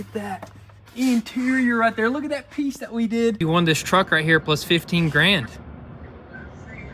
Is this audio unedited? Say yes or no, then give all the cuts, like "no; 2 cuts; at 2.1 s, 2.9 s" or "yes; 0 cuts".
no; 1 cut; at 3.4 s